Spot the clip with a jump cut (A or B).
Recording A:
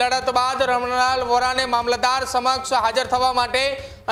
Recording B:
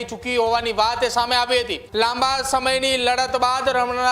B